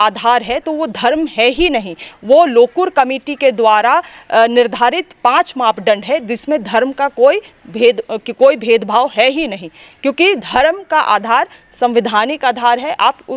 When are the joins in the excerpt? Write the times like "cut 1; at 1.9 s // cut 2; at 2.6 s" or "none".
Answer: none